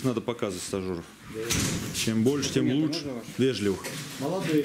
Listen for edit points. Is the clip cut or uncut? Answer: uncut